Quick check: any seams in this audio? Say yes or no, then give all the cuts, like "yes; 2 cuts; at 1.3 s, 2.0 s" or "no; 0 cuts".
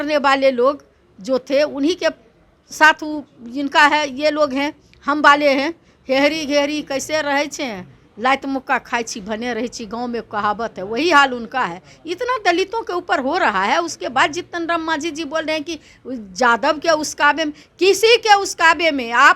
yes; 1 cut; at 5.9 s